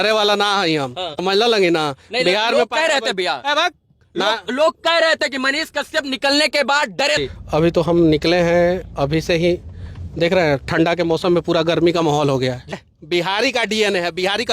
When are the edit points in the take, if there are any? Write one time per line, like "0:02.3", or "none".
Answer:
0:01.1
0:07.2
0:12.7